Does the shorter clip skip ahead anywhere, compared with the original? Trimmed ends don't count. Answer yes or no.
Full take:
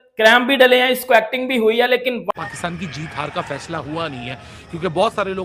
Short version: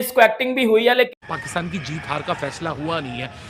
yes